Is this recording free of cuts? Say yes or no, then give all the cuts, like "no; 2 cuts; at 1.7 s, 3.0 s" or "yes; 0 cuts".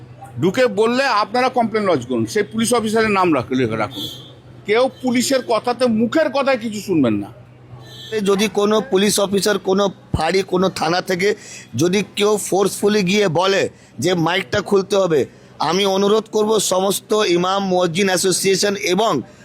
no; 2 cuts; at 4.5 s, 8.2 s